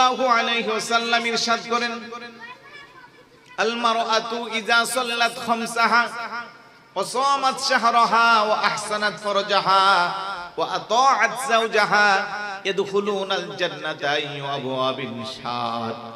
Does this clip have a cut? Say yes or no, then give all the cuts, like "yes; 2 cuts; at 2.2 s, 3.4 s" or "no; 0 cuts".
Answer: no; 0 cuts